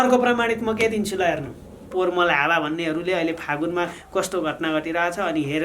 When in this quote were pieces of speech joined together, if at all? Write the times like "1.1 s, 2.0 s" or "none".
1.9 s